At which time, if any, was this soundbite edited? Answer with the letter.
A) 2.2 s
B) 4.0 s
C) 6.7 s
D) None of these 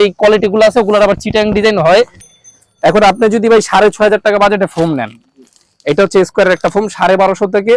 A